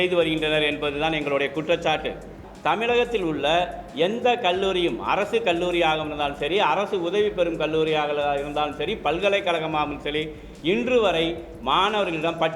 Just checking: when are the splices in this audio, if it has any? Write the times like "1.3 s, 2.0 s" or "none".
2.4 s